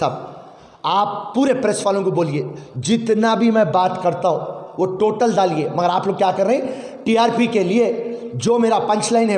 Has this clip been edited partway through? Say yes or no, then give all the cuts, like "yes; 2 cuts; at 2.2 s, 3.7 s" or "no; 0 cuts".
no; 0 cuts